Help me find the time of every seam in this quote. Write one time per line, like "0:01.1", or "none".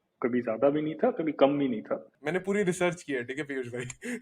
0:02.1